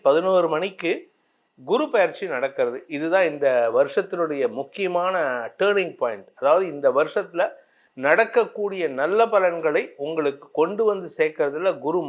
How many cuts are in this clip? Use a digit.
0